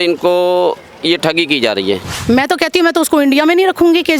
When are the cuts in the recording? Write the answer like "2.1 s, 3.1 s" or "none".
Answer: 2.1 s